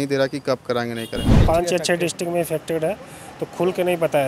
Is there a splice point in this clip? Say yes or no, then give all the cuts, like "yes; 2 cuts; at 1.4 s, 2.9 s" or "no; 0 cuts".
yes; 1 cut; at 1.4 s